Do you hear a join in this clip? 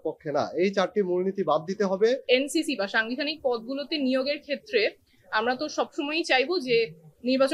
yes; 1 cut; at 2.2 s

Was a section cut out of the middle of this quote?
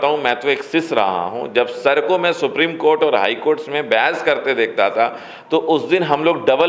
no; 0 cuts

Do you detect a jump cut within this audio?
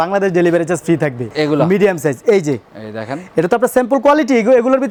no; 0 cuts

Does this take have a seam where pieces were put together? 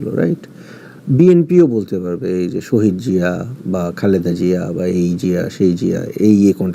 no; 0 cuts

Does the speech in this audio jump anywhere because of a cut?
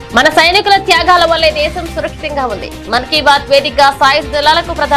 no; 0 cuts

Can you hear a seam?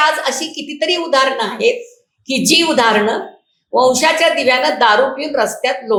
no; 0 cuts

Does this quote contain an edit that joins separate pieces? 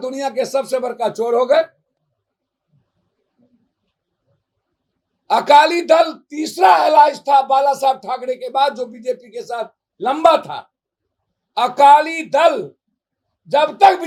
no; 0 cuts

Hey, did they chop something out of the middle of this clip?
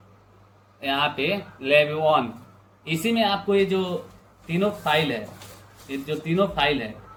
no; 0 cuts

